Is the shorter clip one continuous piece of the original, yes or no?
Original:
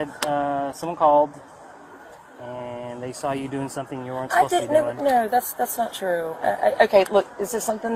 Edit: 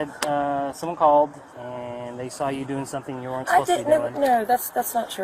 no